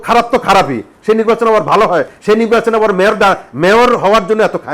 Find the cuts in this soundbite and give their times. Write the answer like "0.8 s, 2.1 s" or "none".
none